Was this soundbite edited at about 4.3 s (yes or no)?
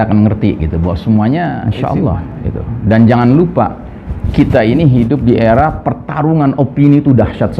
no